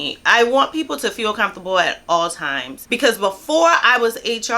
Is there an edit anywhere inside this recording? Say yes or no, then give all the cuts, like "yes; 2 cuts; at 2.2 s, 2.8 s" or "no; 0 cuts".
yes; 1 cut; at 2.8 s